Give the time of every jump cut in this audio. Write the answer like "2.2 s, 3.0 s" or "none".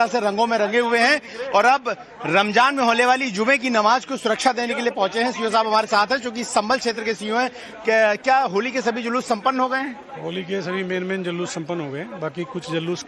none